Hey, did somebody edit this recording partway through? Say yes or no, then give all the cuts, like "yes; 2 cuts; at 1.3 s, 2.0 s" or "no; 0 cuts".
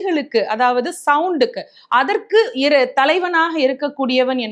no; 0 cuts